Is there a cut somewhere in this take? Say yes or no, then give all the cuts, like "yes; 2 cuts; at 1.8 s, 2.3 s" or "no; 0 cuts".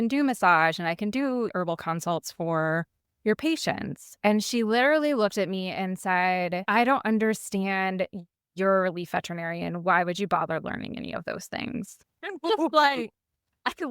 yes; 1 cut; at 12.0 s